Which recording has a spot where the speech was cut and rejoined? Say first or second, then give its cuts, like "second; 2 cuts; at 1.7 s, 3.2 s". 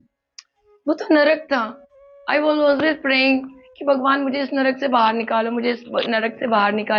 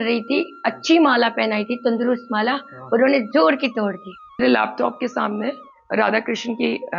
second; 1 cut; at 4.4 s